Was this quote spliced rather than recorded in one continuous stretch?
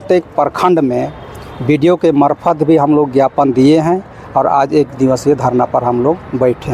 no; 0 cuts

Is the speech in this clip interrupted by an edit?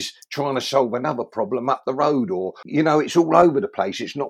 yes; 1 cut; at 2.6 s

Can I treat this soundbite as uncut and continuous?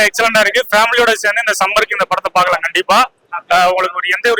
yes; 0 cuts

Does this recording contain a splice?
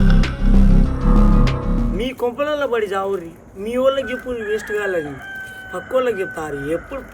yes; 1 cut; at 1.9 s

